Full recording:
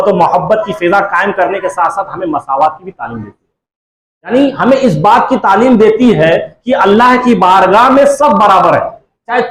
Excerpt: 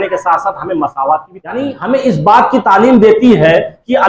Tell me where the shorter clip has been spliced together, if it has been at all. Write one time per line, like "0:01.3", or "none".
0:01.8